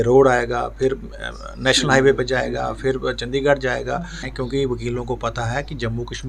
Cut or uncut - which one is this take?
cut